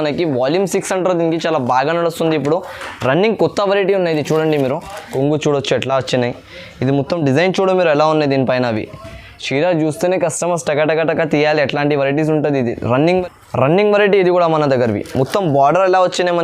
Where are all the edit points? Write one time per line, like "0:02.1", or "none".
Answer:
0:05.0
0:13.1